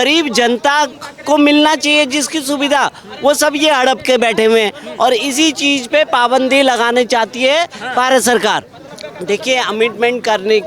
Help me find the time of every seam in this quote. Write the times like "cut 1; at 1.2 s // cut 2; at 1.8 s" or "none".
none